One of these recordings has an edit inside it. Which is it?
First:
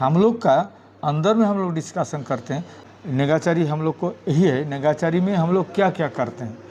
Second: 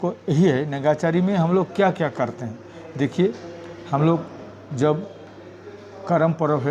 first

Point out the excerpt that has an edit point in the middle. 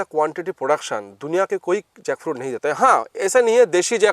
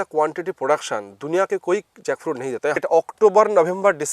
second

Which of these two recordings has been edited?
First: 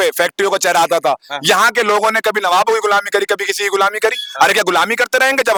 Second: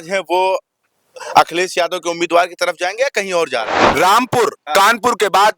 second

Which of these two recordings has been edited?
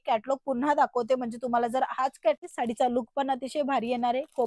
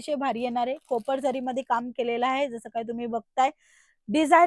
first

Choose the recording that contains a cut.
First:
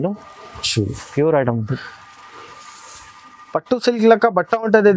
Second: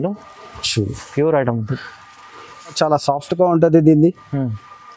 second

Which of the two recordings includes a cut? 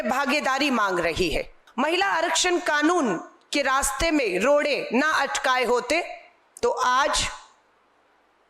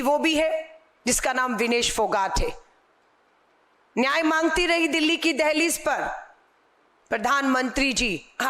first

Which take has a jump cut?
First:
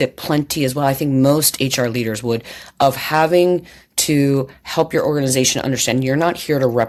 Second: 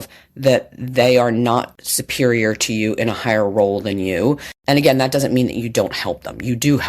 second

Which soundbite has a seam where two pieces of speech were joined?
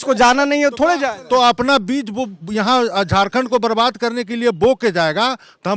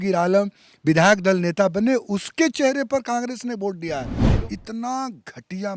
second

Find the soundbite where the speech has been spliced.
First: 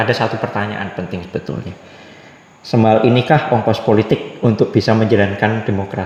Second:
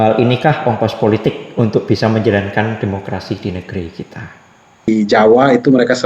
second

